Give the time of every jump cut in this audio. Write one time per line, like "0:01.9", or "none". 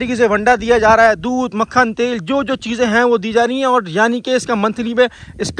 none